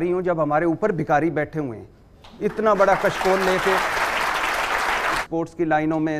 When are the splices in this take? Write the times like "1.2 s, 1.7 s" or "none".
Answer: 5.2 s

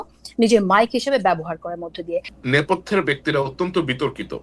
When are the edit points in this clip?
2.3 s

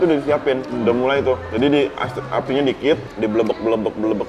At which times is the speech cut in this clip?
none

